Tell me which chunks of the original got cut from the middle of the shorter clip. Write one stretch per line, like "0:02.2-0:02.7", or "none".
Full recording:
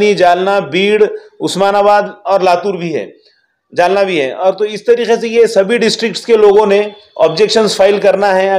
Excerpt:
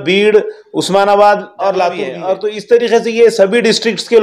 0:02.8-0:04.3